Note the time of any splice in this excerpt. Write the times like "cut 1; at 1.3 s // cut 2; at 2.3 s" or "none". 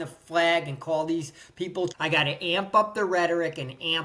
cut 1; at 1.9 s